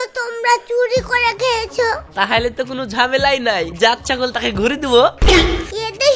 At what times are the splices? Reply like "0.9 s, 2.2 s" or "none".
2.1 s